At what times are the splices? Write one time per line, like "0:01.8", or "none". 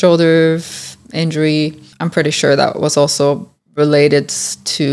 0:01.9